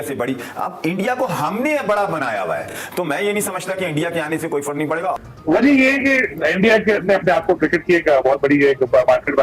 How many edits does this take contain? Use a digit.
1